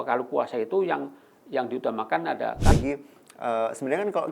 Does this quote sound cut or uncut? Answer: cut